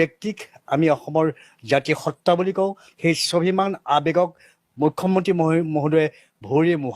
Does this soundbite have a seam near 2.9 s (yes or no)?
yes